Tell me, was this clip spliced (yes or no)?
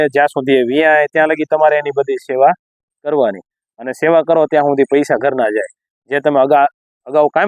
no